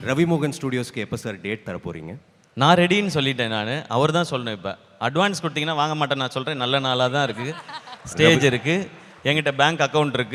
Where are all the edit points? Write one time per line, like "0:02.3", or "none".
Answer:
none